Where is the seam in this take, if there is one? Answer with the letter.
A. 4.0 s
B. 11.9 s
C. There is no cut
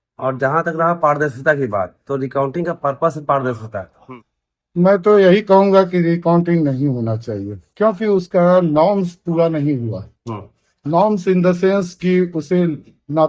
A